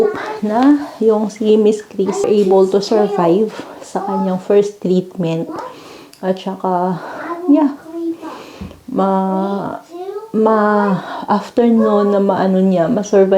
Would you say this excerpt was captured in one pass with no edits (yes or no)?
no